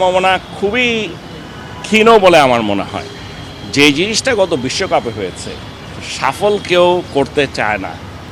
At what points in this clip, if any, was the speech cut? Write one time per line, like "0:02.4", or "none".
none